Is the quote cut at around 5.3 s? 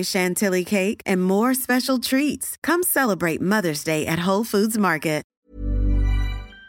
yes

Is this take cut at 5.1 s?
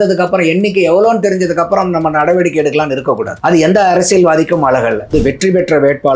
yes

